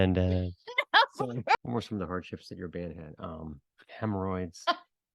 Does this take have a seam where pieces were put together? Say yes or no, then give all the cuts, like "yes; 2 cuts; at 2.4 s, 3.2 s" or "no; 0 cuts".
yes; 1 cut; at 1.5 s